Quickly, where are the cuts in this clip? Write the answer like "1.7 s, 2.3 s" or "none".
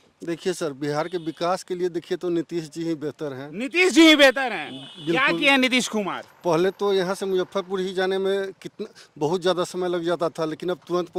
none